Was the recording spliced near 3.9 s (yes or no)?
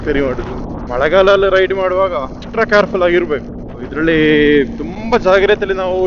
no